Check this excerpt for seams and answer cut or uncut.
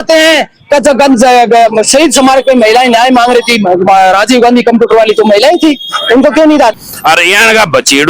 cut